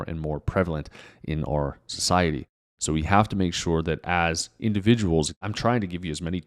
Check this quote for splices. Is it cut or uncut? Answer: cut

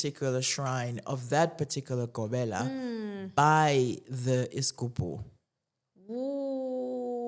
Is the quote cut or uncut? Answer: uncut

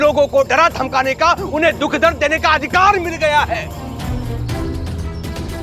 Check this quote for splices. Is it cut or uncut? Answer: cut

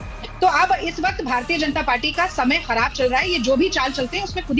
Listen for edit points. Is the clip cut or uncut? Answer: uncut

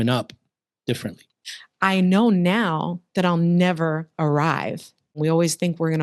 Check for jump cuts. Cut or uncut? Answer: cut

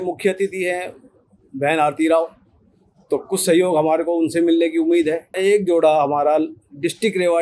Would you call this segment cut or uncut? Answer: cut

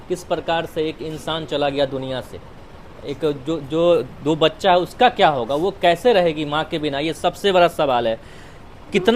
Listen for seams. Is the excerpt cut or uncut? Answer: uncut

